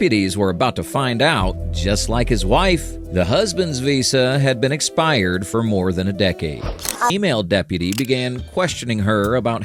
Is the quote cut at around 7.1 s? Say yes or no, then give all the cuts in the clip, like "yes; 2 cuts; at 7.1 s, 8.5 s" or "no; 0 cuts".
yes; 1 cut; at 7.1 s